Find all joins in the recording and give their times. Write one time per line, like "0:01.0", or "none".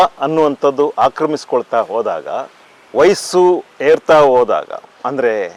none